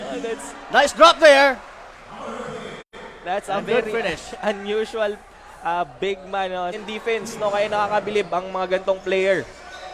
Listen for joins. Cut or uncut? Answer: cut